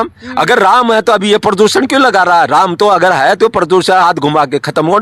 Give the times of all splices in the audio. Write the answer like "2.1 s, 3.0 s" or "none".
none